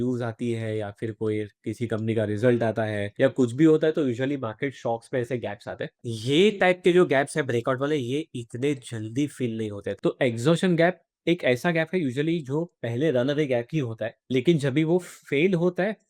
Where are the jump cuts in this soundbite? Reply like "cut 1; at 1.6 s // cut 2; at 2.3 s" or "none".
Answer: cut 1; at 5.9 s // cut 2; at 10.0 s